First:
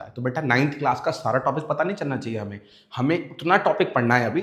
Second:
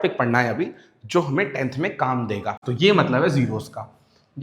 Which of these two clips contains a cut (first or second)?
second